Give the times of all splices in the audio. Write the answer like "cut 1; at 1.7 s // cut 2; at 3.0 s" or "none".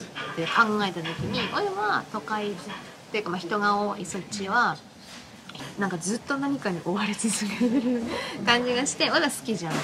cut 1; at 5.6 s